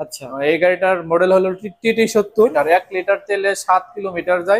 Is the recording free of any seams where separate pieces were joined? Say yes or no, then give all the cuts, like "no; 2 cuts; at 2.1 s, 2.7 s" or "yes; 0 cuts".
no; 1 cut; at 2.5 s